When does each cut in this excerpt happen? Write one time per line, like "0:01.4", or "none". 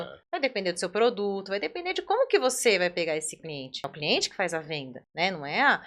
0:03.8
0:05.0